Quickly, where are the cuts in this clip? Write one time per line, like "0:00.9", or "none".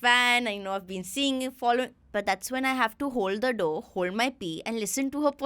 0:02.0